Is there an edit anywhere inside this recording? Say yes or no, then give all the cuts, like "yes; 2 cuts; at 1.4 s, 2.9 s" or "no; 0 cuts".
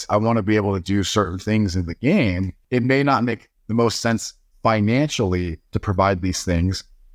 no; 0 cuts